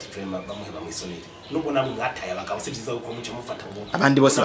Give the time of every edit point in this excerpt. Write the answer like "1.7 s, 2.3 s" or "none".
none

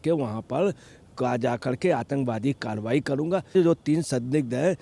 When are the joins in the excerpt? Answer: 3.5 s

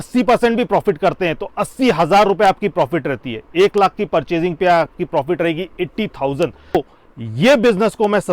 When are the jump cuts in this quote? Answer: 6.7 s

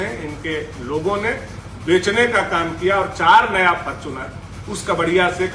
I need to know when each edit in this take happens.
none

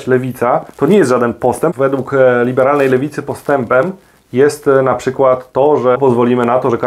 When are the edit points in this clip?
1.7 s, 6.0 s

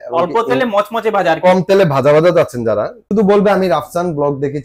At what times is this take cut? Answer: 3.0 s

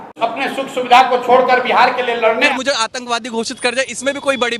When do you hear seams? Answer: 2.5 s

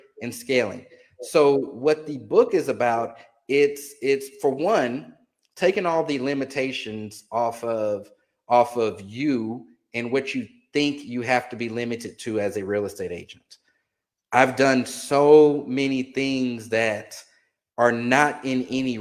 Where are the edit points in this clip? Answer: none

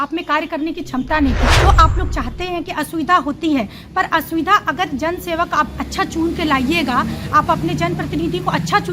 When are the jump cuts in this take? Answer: 1.5 s

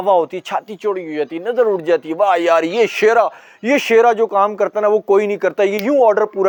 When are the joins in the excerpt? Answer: none

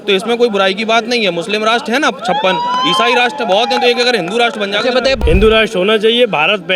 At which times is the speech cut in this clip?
5.2 s

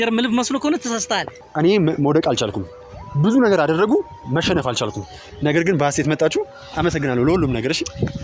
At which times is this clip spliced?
1.3 s

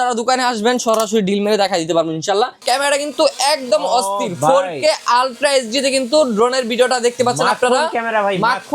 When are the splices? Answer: 2.6 s

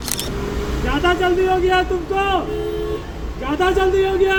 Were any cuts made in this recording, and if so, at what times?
none

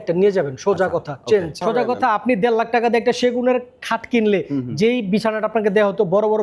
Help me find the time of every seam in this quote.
1.6 s

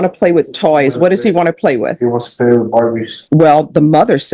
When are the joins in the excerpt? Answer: 3.1 s

